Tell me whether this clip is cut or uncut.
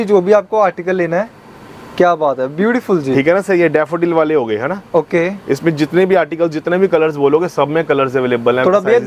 uncut